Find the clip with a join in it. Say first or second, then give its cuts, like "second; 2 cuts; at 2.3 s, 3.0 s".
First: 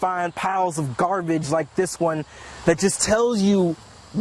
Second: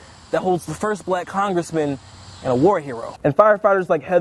second; 1 cut; at 3.0 s